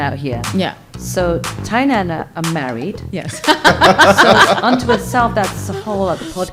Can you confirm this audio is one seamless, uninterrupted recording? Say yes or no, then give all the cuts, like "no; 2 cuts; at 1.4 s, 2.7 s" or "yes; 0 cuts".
yes; 0 cuts